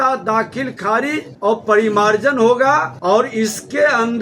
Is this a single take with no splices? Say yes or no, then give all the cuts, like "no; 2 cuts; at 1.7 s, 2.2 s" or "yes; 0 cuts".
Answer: no; 2 cuts; at 1.3 s, 2.9 s